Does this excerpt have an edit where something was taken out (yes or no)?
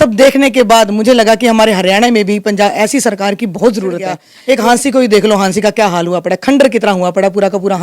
yes